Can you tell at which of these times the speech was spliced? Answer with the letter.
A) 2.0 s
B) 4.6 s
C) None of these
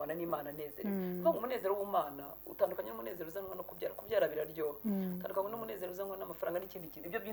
C